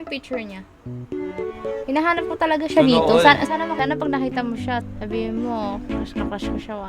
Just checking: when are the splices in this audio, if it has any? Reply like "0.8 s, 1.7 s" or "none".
3.7 s